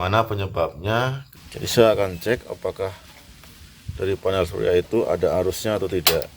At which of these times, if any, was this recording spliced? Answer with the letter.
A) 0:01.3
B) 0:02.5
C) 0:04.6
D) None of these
A